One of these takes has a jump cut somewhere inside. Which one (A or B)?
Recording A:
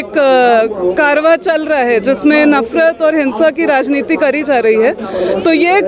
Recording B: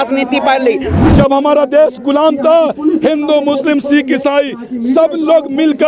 B